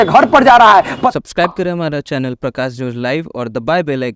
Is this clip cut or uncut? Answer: cut